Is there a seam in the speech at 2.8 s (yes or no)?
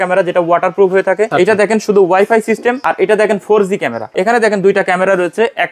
yes